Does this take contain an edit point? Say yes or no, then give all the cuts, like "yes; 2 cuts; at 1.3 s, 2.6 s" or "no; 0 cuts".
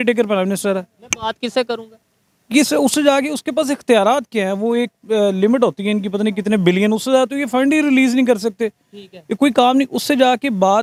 no; 0 cuts